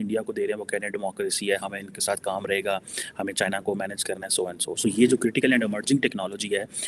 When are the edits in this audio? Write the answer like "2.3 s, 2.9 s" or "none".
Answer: none